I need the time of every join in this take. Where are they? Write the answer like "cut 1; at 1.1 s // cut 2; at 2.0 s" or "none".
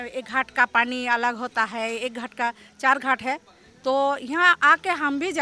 none